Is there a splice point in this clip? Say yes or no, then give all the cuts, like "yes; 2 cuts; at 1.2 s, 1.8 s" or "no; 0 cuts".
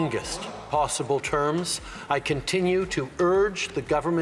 no; 0 cuts